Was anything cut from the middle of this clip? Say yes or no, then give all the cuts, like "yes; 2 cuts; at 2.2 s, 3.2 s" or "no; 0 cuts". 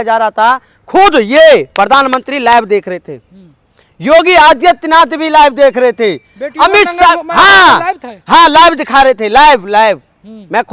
no; 0 cuts